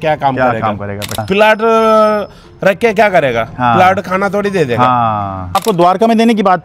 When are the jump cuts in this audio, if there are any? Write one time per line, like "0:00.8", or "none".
0:01.2
0:05.6